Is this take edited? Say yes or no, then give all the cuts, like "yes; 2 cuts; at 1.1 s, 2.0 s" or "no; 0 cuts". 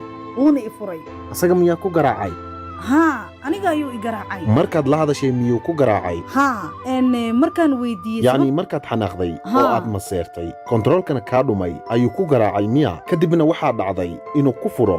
no; 0 cuts